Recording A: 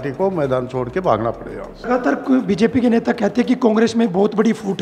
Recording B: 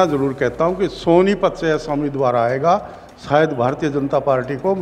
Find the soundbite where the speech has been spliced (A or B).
A